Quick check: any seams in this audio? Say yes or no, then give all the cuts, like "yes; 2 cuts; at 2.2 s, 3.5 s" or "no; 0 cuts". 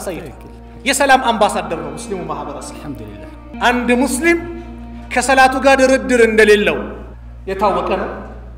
yes; 1 cut; at 3.5 s